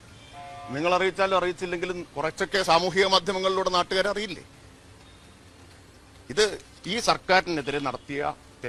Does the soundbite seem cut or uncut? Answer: uncut